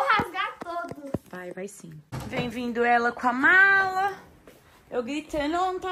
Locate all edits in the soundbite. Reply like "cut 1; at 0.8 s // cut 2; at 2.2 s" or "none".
cut 1; at 2.1 s